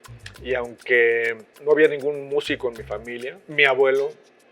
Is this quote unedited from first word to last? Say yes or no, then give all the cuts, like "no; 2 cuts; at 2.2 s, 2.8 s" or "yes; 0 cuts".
no; 2 cuts; at 1.5 s, 3.5 s